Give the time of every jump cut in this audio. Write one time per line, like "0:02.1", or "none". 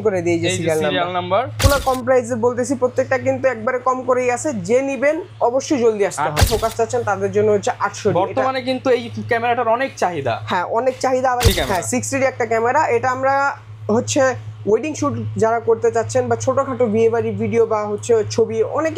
0:01.6
0:06.4
0:11.5